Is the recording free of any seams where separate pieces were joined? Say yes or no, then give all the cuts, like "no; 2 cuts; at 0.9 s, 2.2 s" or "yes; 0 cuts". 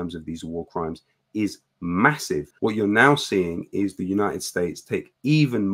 no; 1 cut; at 2.5 s